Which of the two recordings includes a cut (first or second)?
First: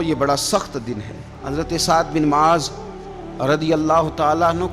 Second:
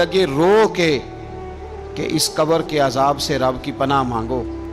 first